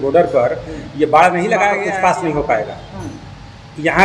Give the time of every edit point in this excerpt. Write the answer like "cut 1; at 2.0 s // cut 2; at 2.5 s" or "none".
cut 1; at 1.8 s